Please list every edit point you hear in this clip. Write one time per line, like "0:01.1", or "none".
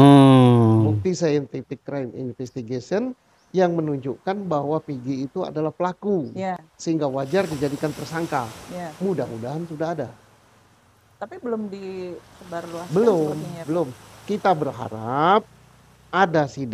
0:01.0